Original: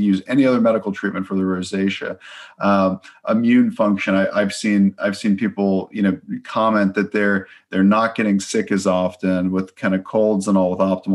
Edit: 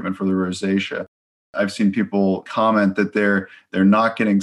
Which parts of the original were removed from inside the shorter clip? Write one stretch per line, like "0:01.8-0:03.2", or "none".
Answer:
0:02.6-0:04.9
0:05.9-0:06.4